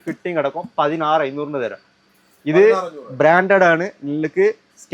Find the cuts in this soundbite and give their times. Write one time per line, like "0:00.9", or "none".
none

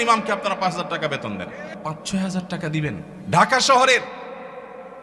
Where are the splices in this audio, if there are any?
0:01.7
0:03.1

